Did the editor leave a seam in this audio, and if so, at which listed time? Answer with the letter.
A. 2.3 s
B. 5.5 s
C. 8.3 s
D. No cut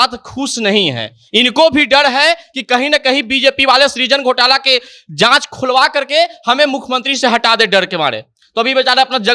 D